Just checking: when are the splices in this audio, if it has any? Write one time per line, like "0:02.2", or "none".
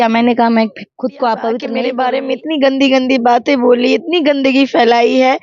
0:01.7